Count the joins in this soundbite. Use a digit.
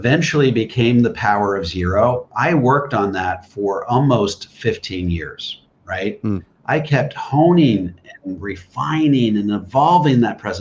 0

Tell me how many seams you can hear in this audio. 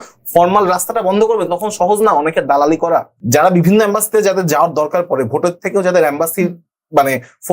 1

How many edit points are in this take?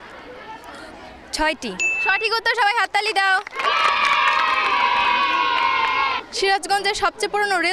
3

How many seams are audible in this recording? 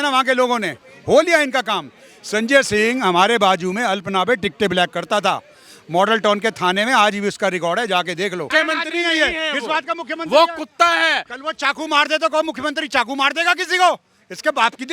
1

